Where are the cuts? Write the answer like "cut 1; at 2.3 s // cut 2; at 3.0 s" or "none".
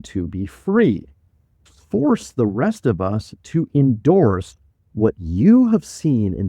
cut 1; at 1.6 s